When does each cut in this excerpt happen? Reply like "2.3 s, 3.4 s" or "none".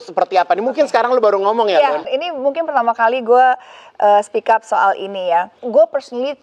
2.1 s, 5.6 s